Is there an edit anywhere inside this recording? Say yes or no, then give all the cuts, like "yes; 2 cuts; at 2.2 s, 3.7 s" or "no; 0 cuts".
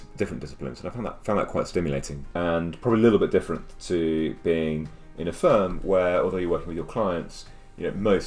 yes; 1 cut; at 2.2 s